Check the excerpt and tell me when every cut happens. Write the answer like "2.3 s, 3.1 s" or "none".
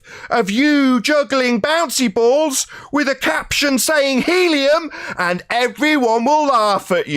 none